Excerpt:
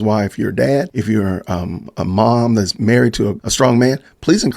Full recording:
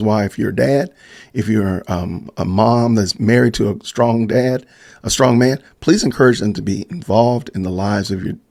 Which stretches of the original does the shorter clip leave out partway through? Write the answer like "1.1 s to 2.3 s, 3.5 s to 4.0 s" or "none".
0.9 s to 1.3 s, 3.8 s to 5.0 s